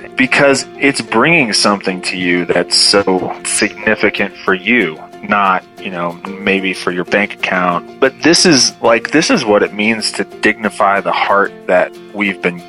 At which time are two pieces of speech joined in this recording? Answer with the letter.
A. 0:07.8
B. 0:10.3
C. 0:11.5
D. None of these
A